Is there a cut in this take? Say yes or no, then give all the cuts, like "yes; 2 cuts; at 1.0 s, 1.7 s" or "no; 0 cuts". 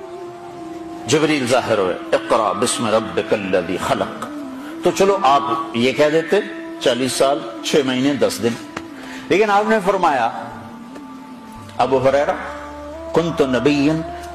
no; 0 cuts